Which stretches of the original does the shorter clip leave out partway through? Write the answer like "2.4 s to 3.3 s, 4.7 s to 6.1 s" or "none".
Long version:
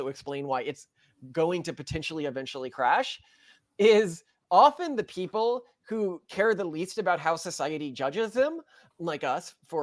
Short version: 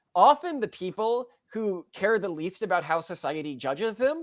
none